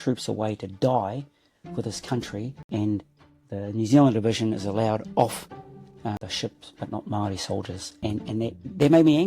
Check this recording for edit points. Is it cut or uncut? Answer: cut